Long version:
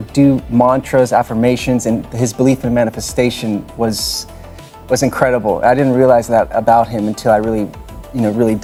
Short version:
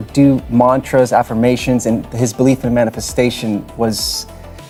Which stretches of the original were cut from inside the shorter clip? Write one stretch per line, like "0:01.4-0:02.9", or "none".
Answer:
none